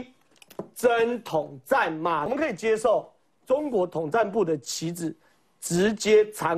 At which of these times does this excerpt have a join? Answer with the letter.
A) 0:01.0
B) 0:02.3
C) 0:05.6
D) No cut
B